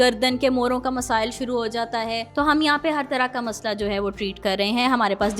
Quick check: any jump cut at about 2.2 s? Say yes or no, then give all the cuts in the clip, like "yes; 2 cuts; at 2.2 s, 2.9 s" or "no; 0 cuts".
yes; 1 cut; at 2.2 s